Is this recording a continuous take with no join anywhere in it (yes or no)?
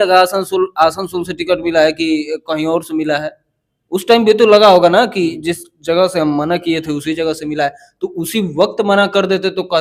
yes